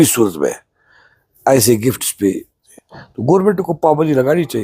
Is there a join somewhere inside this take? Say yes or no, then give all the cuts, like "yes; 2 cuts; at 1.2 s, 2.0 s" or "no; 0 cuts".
yes; 1 cut; at 2.6 s